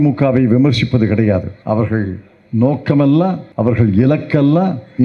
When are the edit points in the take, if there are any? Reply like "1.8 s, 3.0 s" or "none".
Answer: 1.5 s, 3.5 s